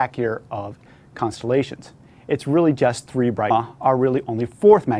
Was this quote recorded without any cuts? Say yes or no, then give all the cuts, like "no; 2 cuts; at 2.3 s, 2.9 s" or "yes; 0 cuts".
yes; 0 cuts